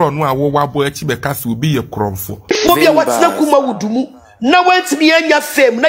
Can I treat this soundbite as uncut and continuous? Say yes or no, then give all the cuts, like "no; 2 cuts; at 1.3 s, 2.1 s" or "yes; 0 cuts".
no; 1 cut; at 2.3 s